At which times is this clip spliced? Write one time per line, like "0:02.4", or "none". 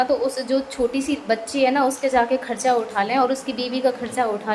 none